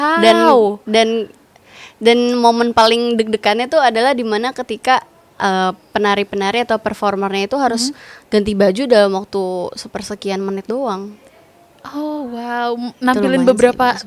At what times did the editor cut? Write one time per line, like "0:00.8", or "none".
none